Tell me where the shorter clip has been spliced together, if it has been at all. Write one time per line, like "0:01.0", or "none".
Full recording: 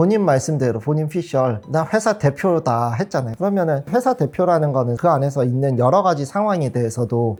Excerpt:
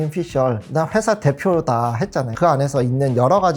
0:02.3

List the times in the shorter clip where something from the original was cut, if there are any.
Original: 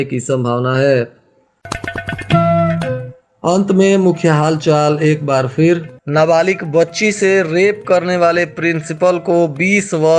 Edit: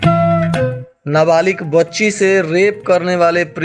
0:00.9

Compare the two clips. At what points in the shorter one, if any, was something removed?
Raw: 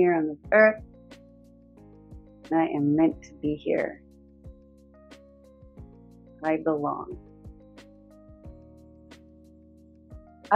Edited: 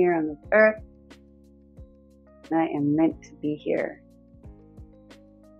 0:04.5

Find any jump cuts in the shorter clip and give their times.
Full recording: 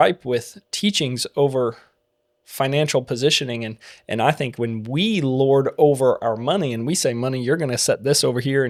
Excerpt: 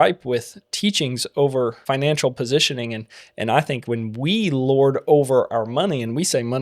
0:01.8

